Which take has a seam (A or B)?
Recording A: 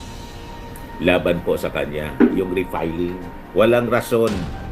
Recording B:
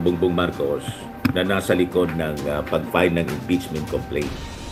A